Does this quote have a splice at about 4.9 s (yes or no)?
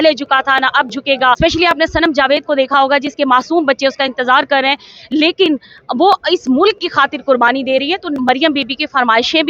no